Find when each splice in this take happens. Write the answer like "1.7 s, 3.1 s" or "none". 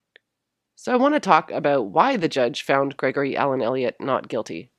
2.6 s